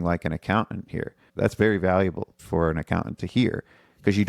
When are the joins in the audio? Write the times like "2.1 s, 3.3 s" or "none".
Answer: 1.2 s, 2.4 s